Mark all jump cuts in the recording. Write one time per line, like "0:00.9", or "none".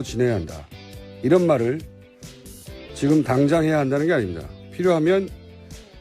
0:04.1